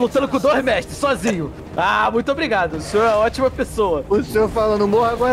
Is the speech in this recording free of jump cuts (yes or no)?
no